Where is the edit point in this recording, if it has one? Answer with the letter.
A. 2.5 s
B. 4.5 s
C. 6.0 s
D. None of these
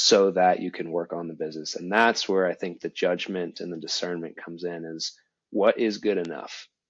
D